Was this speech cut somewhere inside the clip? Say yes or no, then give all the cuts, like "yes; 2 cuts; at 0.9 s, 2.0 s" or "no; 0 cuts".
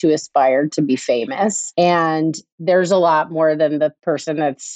yes; 3 cuts; at 1.6 s, 2.5 s, 4.0 s